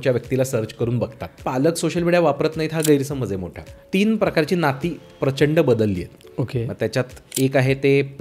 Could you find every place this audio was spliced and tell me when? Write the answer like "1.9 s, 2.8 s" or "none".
1.4 s, 3.7 s